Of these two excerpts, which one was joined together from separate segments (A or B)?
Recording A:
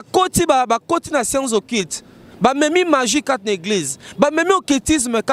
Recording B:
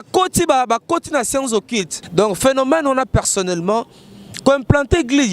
B